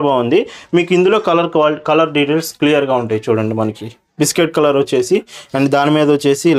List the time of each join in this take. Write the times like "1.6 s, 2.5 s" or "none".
none